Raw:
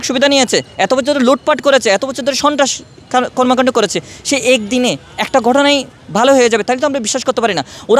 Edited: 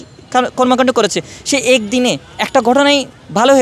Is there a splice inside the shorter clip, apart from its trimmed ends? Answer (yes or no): no